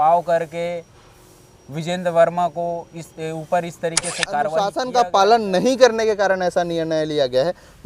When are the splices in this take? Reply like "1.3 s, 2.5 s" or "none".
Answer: 4.8 s